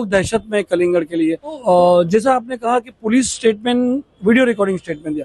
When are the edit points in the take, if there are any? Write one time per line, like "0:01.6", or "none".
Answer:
0:01.6